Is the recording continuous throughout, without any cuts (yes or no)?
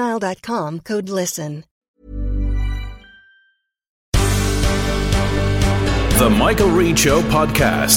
no